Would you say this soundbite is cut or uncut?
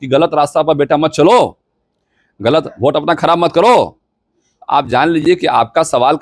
uncut